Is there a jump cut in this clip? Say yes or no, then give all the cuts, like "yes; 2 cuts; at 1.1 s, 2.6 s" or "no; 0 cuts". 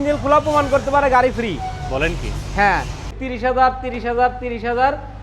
yes; 1 cut; at 3.2 s